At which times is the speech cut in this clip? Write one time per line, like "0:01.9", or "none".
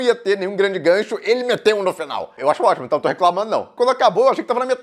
0:02.4
0:03.7